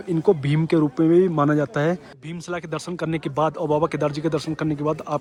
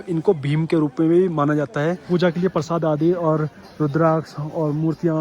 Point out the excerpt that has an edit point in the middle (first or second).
second